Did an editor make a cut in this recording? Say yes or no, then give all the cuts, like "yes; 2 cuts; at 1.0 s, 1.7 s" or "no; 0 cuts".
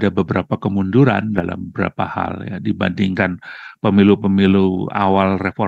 no; 0 cuts